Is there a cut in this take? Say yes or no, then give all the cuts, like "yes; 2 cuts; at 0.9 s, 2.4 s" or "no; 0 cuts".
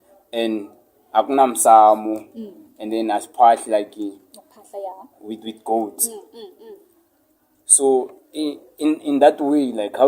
no; 0 cuts